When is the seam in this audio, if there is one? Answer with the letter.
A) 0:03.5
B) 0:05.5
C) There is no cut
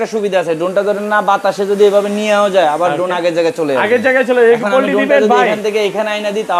C